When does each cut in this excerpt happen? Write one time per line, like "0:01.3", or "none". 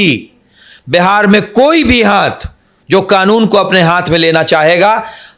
none